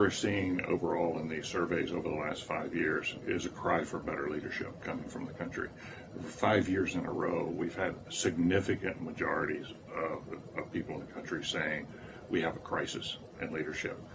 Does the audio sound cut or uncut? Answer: cut